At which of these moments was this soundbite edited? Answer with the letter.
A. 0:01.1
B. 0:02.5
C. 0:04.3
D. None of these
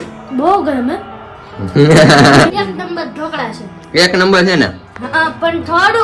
B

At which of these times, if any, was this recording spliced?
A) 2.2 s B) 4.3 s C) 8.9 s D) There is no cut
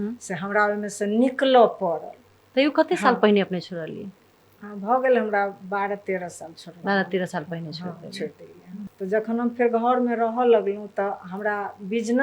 C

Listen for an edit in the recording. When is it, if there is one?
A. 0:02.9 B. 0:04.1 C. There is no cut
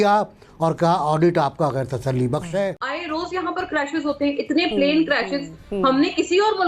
A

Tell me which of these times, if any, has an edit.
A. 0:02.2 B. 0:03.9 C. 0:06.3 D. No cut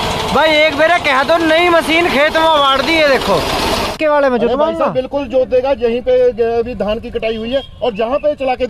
B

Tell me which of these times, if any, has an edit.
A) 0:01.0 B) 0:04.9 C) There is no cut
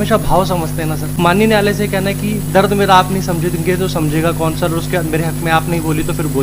A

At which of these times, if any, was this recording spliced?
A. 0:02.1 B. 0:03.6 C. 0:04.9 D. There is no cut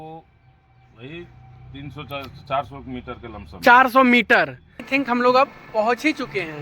C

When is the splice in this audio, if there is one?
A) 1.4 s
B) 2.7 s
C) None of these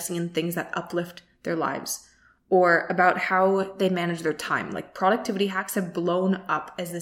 C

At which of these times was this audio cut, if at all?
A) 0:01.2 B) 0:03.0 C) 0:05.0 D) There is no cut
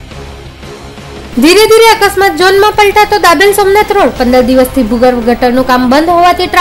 A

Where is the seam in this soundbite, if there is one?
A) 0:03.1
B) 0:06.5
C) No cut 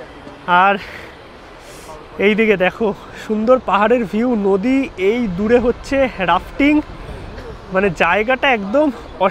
C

